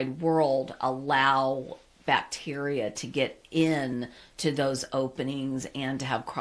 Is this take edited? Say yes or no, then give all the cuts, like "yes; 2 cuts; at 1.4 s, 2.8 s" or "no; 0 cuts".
no; 0 cuts